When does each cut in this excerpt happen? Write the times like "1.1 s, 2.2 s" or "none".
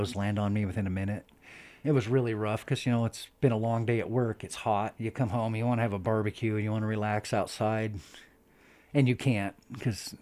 1.6 s, 4.9 s